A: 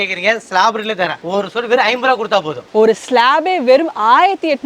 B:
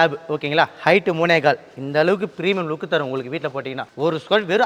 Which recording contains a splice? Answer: A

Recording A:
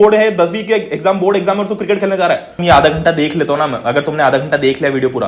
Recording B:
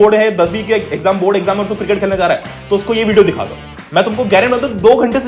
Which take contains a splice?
A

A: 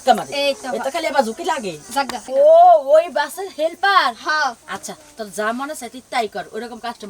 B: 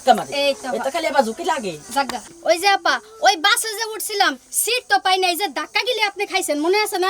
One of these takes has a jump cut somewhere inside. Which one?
A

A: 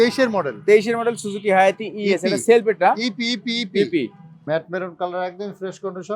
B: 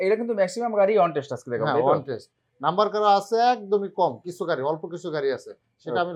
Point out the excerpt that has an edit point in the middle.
A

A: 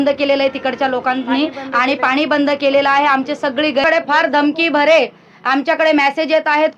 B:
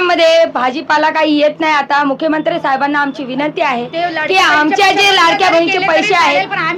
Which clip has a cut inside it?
A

